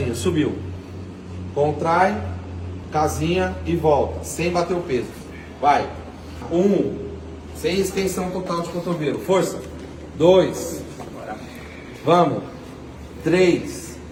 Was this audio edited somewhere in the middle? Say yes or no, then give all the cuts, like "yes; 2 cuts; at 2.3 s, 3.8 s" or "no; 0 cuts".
no; 0 cuts